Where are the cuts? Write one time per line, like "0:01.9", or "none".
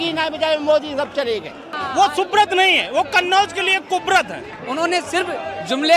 0:01.7
0:04.6